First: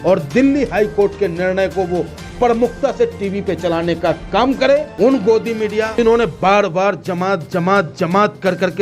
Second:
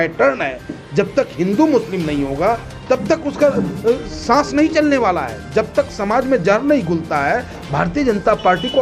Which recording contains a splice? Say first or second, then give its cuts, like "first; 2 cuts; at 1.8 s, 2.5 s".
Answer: first; 2 cuts; at 4.9 s, 5.9 s